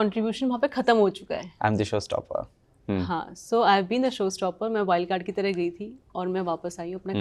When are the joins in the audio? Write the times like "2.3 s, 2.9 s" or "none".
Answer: none